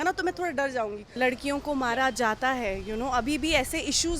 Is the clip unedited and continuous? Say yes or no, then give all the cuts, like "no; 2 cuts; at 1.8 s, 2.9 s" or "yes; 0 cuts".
no; 1 cut; at 1.1 s